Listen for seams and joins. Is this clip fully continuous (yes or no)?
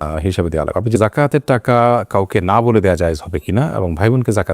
no